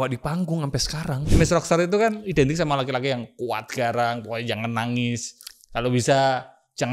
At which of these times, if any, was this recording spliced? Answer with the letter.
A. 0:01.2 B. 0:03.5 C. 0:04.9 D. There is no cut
A